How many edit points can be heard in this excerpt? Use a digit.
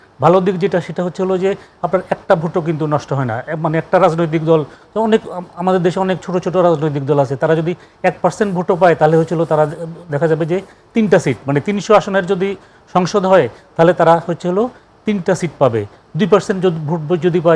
0